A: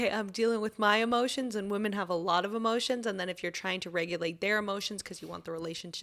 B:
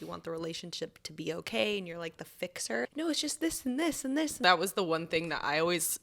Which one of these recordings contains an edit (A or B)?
B